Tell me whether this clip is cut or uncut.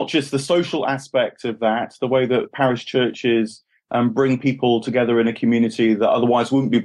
uncut